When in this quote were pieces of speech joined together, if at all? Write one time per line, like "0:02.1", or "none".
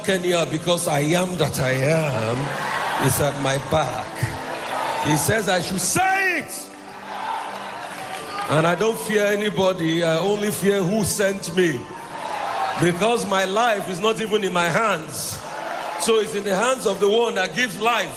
none